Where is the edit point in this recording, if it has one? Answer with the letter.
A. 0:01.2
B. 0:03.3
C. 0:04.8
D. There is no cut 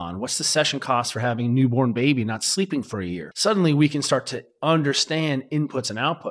B